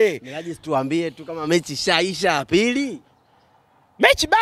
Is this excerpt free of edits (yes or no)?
yes